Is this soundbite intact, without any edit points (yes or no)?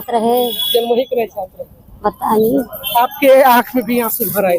yes